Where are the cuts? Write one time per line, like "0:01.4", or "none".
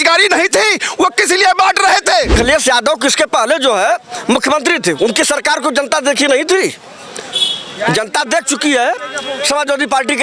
0:02.3